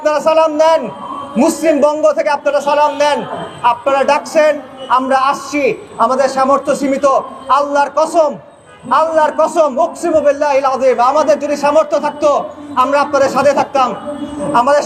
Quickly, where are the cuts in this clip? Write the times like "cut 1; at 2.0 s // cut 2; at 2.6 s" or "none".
none